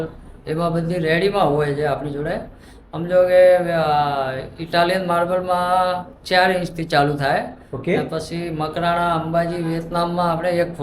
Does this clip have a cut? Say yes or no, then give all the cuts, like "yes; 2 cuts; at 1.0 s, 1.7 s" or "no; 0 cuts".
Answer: no; 0 cuts